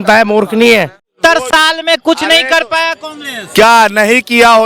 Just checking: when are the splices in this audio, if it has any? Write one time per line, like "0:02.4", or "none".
0:01.1